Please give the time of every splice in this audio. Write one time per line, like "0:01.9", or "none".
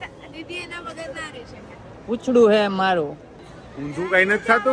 0:01.9